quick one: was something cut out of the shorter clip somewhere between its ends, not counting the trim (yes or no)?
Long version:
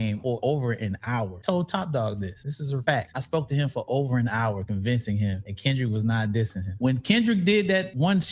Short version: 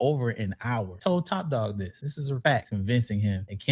yes